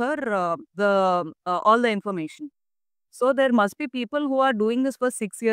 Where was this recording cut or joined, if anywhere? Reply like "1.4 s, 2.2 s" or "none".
none